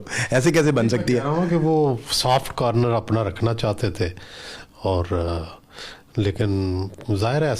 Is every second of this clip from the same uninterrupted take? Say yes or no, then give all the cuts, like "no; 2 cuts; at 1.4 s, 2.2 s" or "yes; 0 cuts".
yes; 0 cuts